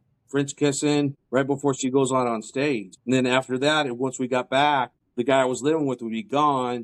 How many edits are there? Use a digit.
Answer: 3